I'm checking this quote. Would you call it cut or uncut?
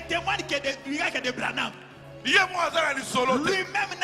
uncut